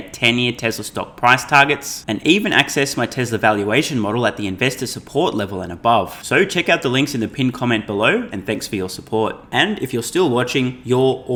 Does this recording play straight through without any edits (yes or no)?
yes